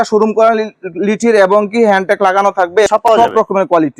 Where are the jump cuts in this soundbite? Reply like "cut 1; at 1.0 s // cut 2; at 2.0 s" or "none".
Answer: cut 1; at 2.9 s